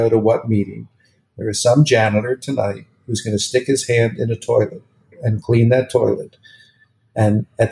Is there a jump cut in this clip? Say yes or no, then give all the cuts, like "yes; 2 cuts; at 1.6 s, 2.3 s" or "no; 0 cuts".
yes; 1 cut; at 5.2 s